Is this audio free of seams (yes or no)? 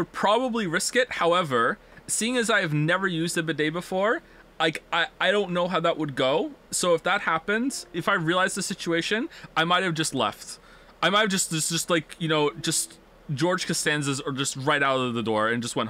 no